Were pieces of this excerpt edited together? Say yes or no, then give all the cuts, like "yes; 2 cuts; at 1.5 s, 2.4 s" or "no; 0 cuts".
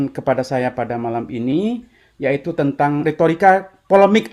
yes; 1 cut; at 3.0 s